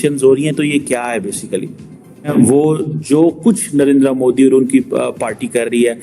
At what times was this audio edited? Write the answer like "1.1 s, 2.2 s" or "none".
2.3 s